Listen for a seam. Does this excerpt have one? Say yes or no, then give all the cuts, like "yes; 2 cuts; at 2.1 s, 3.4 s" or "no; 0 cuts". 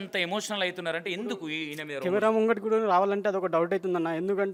no; 0 cuts